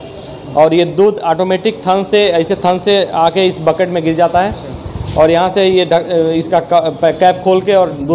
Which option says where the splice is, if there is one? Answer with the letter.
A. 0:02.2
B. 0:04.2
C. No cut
C